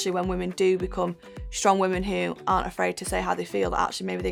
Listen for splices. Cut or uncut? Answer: uncut